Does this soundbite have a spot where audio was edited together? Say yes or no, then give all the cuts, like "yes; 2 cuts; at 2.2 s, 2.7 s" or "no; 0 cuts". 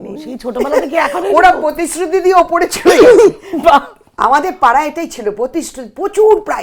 no; 0 cuts